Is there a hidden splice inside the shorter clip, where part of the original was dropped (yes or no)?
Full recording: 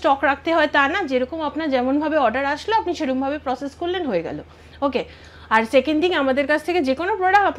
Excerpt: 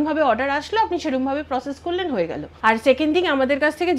yes